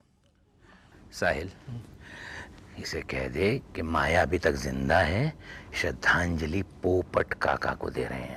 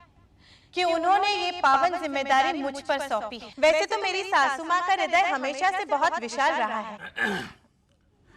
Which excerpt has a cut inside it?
second; 1 cut; at 3.4 s

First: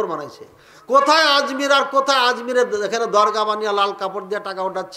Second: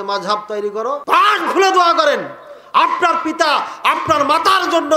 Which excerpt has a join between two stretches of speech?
second; 1 cut; at 1.0 s

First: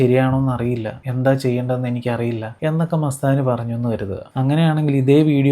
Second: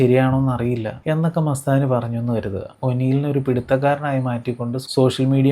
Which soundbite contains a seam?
second; 2 cuts; at 0.9 s, 2.7 s

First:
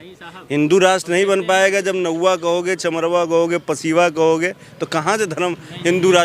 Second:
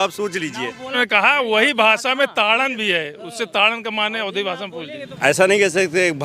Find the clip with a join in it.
second; 2 cuts; at 1.0 s, 5.0 s

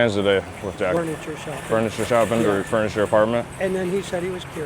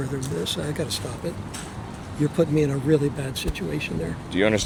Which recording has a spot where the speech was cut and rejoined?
first; 1 cut; at 1.0 s

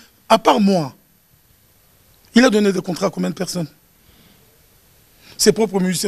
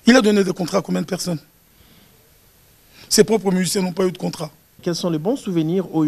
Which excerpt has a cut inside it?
second; 1 cut; at 4.8 s

